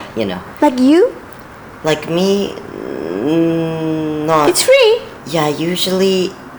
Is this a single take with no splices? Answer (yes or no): no